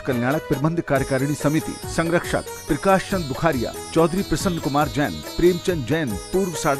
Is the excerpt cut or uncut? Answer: uncut